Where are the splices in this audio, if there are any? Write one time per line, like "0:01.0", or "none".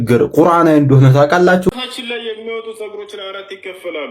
0:01.7